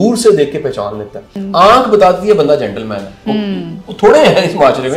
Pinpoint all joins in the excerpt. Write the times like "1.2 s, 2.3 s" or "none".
1.4 s